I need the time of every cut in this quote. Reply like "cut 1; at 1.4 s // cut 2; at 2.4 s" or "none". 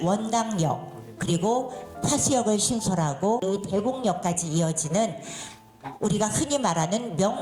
cut 1; at 3.4 s